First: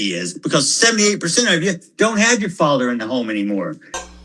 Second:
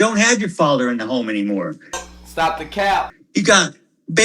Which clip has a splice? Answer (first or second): second